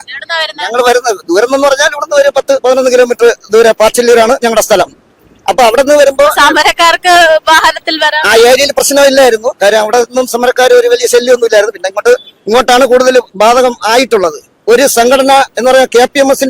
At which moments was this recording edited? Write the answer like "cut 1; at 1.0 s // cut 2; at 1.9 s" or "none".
cut 1; at 14.6 s